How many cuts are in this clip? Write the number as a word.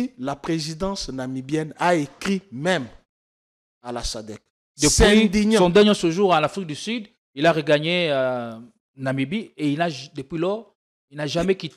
zero